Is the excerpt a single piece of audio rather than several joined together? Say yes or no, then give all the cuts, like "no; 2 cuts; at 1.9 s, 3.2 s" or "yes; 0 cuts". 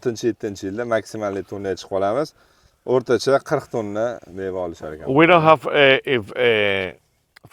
yes; 0 cuts